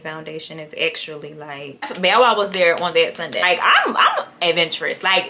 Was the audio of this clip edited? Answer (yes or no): yes